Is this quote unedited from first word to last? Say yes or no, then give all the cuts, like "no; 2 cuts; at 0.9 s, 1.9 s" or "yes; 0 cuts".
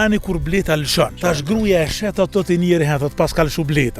no; 1 cut; at 1.1 s